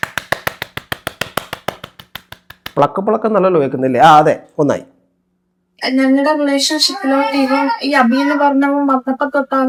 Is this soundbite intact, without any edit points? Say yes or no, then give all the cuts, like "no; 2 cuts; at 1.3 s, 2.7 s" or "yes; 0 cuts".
yes; 0 cuts